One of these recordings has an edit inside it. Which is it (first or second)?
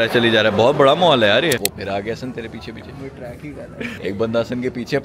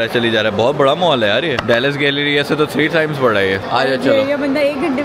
first